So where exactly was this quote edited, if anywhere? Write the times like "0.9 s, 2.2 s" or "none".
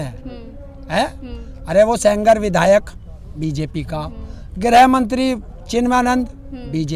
none